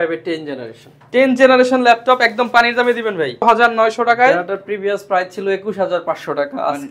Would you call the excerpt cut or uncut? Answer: cut